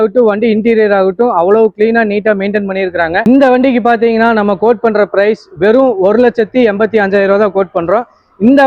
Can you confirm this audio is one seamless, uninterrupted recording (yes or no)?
no